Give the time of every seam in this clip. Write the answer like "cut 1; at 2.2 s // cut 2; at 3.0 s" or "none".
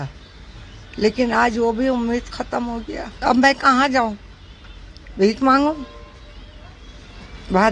cut 1; at 3.0 s